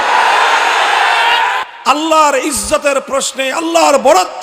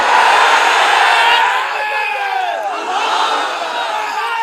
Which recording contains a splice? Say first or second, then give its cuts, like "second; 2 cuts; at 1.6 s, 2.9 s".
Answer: first; 1 cut; at 1.7 s